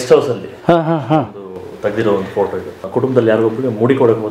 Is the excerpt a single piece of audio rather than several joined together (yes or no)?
no